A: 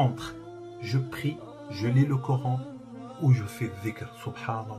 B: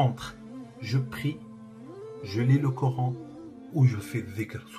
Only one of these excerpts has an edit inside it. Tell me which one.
A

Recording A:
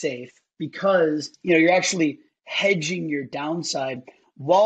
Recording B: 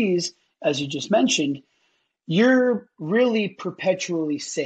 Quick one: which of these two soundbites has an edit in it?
A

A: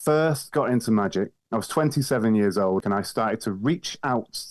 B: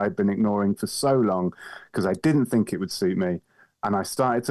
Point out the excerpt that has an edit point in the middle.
A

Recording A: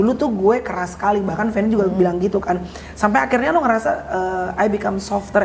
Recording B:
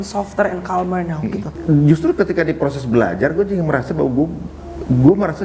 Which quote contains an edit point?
B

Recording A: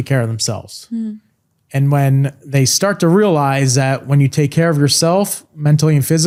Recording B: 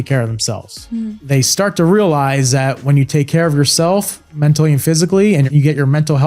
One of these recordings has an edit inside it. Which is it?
B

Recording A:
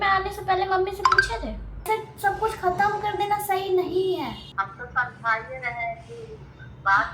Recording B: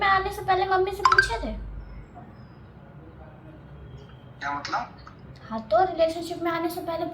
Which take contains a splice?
A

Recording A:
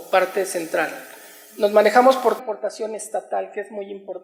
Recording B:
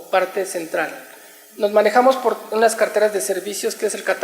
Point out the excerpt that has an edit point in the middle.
B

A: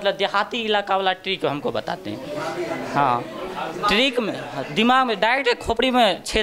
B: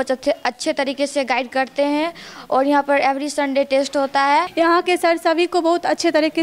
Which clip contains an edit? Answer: B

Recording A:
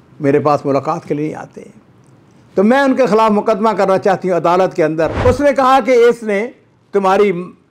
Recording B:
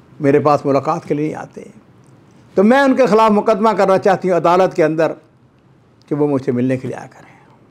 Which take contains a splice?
A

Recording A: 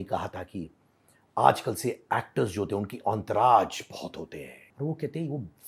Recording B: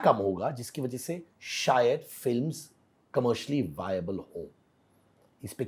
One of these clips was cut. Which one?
A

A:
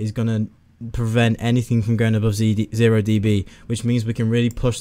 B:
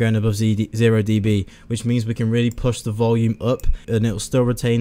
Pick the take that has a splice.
B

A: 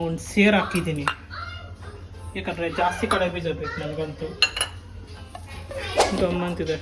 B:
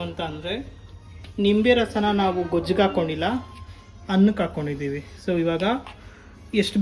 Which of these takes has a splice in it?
A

